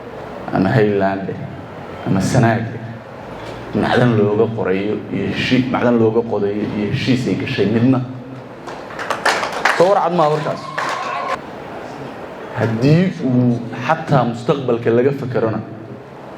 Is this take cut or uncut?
cut